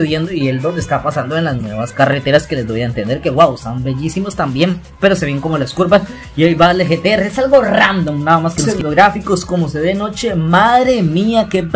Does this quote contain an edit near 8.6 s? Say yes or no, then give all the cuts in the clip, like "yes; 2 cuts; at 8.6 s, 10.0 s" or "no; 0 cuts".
yes; 1 cut; at 8.6 s